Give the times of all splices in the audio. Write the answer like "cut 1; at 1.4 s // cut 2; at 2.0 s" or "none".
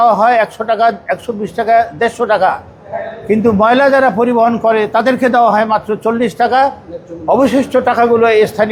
none